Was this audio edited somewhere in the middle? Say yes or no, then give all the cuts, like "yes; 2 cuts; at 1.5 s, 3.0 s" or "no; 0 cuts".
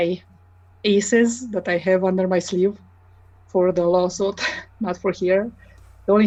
no; 0 cuts